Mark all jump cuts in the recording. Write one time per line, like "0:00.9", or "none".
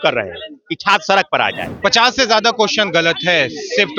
0:01.7